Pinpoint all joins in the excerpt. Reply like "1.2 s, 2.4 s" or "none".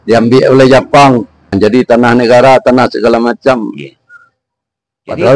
1.4 s